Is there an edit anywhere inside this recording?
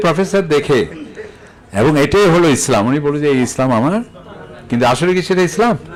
no; 0 cuts

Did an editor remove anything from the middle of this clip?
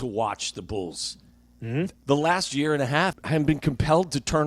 yes; 2 cuts; at 2.0 s, 3.2 s

